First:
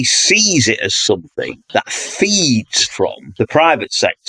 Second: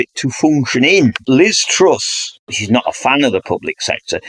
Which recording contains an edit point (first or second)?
second